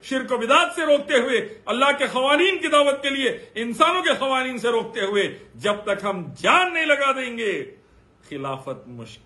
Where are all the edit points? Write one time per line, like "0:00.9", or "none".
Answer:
none